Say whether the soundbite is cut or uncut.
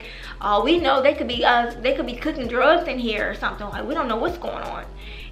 uncut